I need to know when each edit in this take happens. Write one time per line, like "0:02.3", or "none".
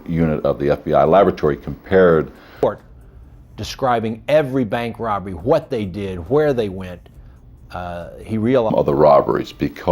0:02.4
0:08.7